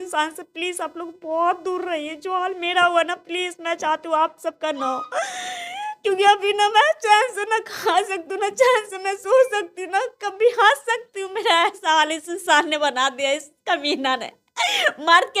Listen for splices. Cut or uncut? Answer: uncut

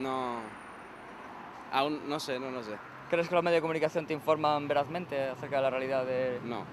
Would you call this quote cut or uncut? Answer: cut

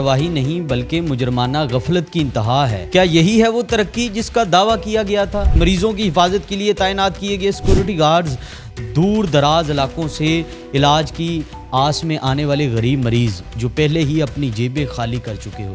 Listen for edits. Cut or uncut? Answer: cut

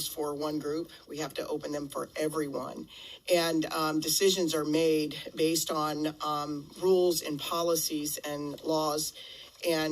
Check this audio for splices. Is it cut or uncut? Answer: cut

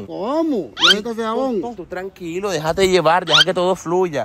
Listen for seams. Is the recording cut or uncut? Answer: uncut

